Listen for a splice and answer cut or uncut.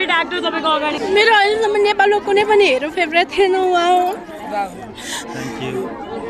cut